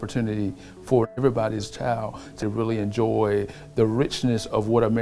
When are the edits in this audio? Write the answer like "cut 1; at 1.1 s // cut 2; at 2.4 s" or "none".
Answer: cut 1; at 1.1 s // cut 2; at 2.4 s